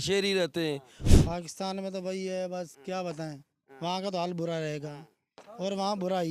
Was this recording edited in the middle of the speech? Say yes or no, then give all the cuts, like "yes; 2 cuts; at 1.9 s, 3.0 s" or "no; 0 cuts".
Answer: yes; 1 cut; at 0.9 s